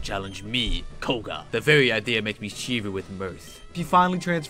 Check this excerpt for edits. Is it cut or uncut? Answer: cut